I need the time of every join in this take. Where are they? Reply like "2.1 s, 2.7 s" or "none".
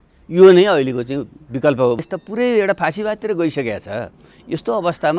2.1 s